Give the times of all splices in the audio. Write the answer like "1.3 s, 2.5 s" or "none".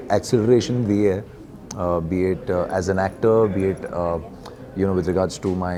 none